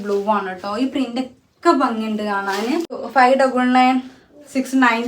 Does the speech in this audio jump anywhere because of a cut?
yes; 1 cut; at 3.0 s

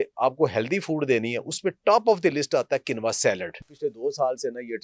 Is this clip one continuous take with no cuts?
no; 1 cut; at 3.7 s

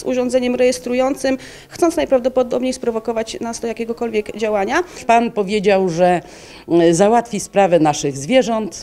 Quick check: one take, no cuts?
no; 1 cut; at 5.3 s

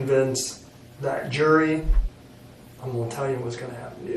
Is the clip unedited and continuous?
no; 1 cut; at 2.0 s

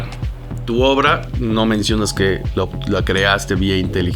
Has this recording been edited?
no; 0 cuts

